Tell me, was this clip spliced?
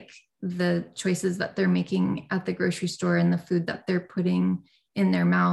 no; 0 cuts

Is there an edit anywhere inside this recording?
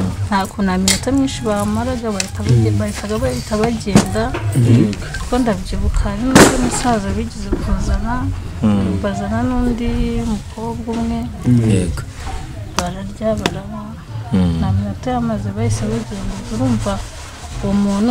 no; 0 cuts

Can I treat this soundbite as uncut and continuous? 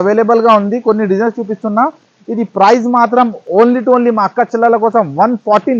yes; 0 cuts

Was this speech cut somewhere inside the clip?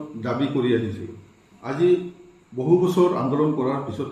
no; 0 cuts

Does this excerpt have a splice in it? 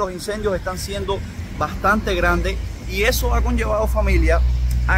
no; 0 cuts

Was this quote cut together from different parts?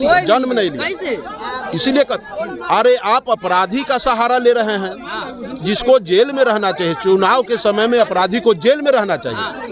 no; 0 cuts

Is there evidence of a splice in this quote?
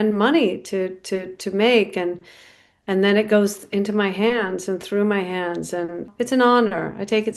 yes; 1 cut; at 6.1 s

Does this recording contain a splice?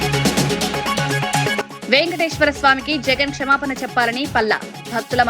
yes; 1 cut; at 1.2 s

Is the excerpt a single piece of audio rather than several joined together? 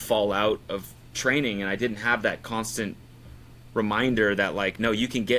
yes; 0 cuts

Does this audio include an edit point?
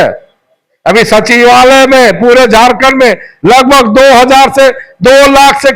no; 0 cuts

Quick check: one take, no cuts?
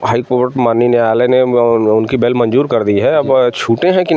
yes; 0 cuts

